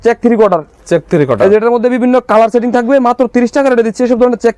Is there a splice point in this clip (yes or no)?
no